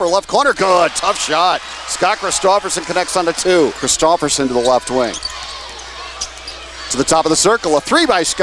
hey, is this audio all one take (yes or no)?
yes